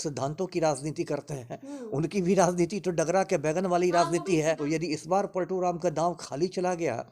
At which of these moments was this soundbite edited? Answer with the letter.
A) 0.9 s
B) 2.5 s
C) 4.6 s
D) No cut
C